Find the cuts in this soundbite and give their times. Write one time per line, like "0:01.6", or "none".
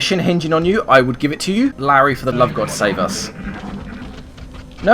0:01.8